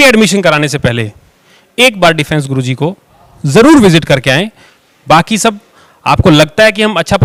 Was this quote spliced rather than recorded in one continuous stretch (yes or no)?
no